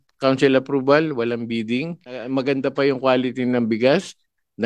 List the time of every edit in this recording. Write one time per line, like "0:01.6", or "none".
0:02.3